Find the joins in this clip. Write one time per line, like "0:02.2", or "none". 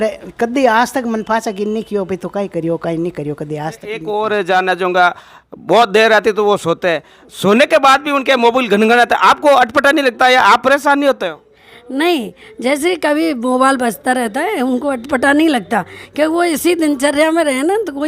0:03.9